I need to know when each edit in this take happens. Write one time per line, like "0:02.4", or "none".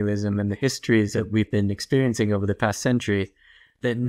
0:01.2